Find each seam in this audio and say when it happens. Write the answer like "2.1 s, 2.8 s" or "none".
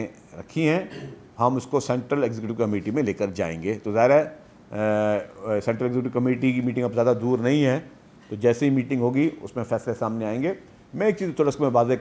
none

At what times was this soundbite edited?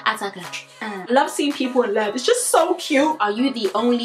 1.1 s, 3.2 s

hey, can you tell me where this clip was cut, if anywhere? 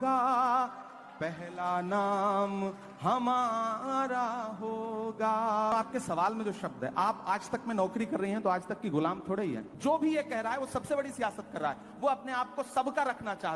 5.7 s, 9.7 s

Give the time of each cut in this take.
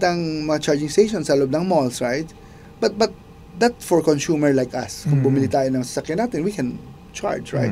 none

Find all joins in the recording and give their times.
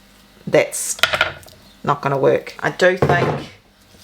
2.5 s

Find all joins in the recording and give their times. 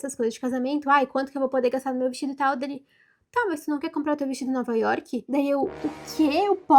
none

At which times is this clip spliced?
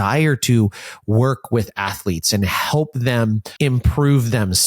3.5 s

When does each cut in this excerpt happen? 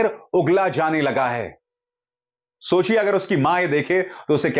none

